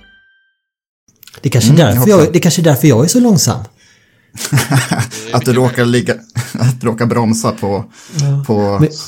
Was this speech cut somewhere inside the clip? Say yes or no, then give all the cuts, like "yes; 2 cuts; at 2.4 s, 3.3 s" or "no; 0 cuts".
yes; 1 cut; at 1.0 s